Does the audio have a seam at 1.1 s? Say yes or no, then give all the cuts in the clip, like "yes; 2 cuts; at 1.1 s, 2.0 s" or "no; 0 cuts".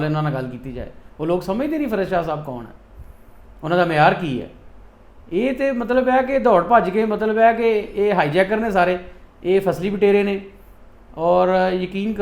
no; 0 cuts